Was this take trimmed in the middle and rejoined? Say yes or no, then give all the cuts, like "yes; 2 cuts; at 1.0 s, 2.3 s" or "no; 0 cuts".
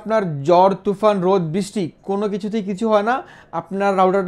no; 0 cuts